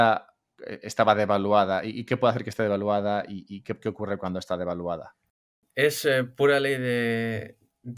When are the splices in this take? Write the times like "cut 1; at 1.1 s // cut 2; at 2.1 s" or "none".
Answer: none